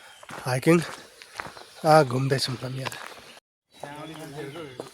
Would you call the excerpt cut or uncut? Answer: cut